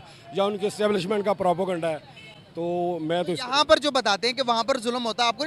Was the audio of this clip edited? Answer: no; 0 cuts

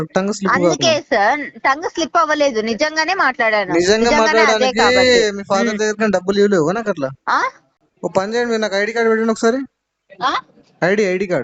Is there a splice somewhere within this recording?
yes; 1 cut; at 7.7 s

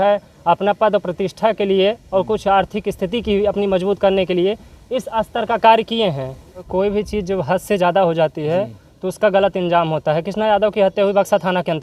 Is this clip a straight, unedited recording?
no; 1 cut; at 6.7 s

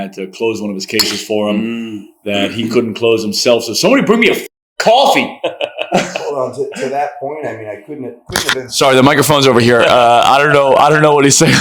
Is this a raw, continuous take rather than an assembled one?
yes; 0 cuts

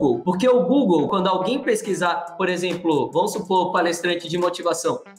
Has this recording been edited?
no; 0 cuts

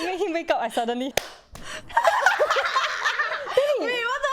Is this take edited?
yes; 1 cut; at 1.1 s

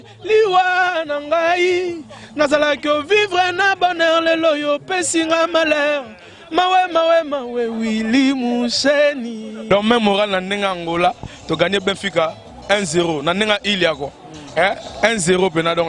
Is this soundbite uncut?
no; 1 cut; at 9.5 s

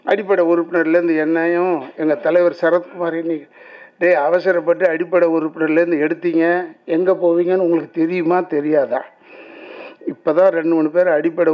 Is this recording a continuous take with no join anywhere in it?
yes; 0 cuts

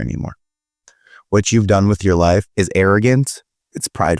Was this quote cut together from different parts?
yes; 1 cut; at 2.5 s

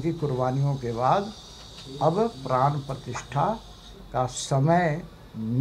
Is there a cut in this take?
no; 0 cuts

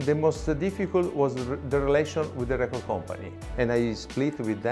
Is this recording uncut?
no; 1 cut; at 3.3 s

